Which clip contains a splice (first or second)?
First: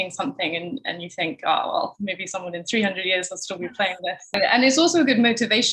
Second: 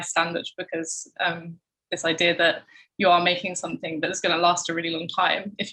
first